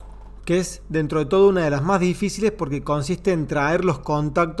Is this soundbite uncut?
yes; 0 cuts

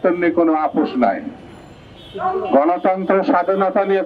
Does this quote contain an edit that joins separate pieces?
no; 0 cuts

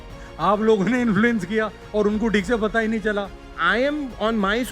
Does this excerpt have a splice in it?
yes; 1 cut; at 3.5 s

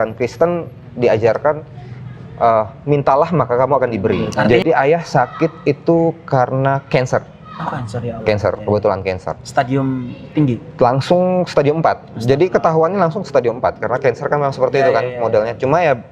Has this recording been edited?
yes; 1 cut; at 4.3 s

